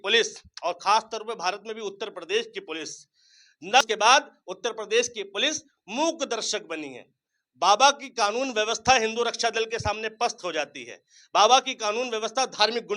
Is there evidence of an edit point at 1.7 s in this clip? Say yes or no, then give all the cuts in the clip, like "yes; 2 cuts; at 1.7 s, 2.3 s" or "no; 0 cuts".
no; 1 cut; at 3.8 s